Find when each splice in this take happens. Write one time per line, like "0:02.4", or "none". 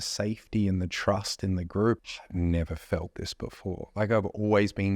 0:02.0